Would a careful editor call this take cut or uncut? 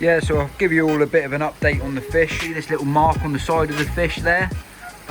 cut